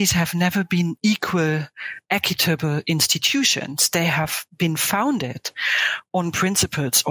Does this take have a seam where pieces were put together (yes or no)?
yes